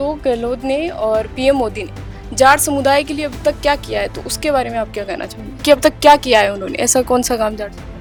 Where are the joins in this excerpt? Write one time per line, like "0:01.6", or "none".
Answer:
none

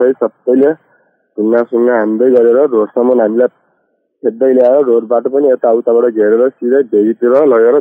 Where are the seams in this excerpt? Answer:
none

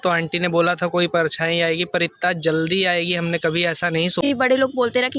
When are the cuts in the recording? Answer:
0:04.2

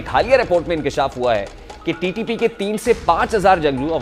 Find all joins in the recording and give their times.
none

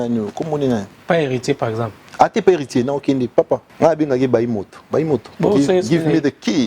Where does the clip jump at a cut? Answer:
0:00.9
0:03.7
0:05.3

